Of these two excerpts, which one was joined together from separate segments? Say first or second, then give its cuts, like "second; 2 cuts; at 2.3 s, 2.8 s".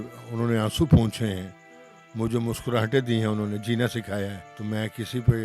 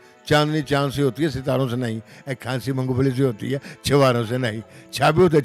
first; 1 cut; at 4.5 s